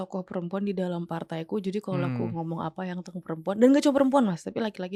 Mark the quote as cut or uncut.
uncut